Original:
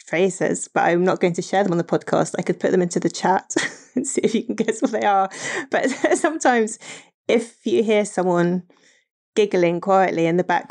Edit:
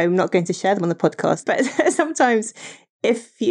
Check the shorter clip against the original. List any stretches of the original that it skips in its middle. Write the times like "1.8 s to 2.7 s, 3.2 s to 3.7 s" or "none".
2.3 s to 5.7 s